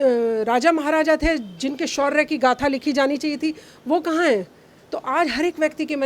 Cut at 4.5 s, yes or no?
no